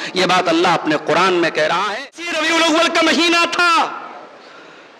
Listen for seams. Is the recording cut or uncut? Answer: cut